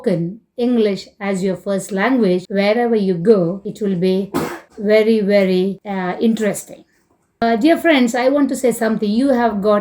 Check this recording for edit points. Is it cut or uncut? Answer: cut